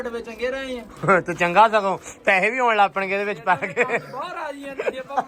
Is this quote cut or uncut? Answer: uncut